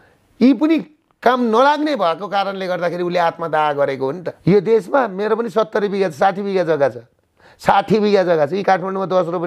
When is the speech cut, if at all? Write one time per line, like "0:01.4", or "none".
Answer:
0:04.3